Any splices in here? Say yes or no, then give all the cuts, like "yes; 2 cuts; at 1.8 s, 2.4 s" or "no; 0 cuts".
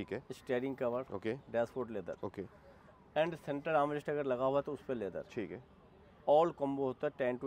no; 0 cuts